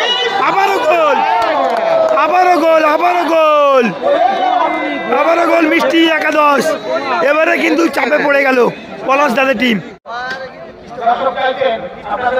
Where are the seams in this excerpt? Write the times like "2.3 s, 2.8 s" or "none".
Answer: 10.0 s